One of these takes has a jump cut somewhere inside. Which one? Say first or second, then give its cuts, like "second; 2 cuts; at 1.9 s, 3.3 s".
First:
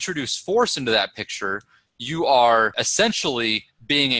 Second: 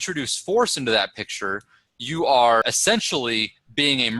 second; 1 cut; at 2.6 s